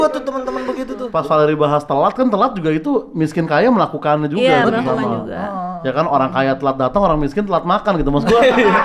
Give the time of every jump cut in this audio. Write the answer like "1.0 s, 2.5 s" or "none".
1.0 s

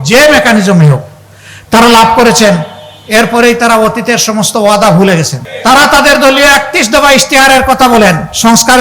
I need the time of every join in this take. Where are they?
5.4 s

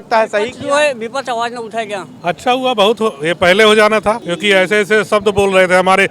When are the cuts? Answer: 2.1 s, 4.3 s

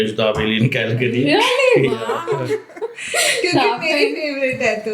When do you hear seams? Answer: none

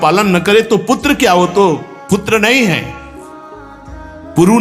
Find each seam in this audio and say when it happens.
none

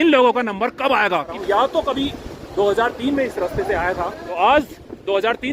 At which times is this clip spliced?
1.3 s, 4.2 s

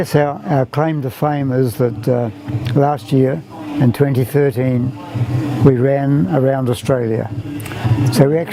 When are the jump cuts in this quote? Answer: none

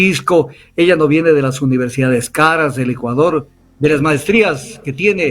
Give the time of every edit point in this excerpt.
3.6 s

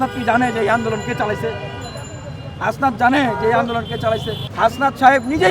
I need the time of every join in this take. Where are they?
4.4 s

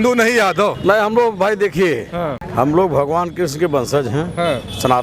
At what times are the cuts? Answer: 0.8 s, 2.4 s

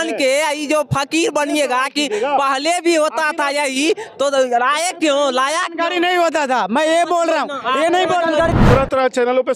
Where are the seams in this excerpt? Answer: 8.5 s

